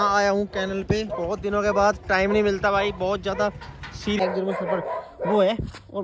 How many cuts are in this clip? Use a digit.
1